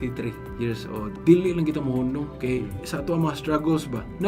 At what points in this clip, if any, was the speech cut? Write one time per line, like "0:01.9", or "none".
0:01.1